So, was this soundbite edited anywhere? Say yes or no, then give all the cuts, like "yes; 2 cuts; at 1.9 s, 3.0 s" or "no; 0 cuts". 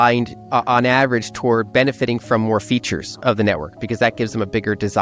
no; 0 cuts